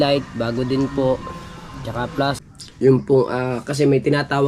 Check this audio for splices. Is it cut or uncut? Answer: cut